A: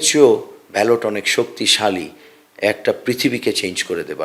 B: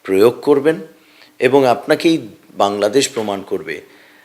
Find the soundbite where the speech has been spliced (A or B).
B